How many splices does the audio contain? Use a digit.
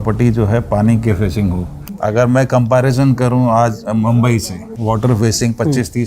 2